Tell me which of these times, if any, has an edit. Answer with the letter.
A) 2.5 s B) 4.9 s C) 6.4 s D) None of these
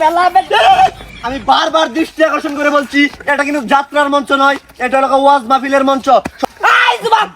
C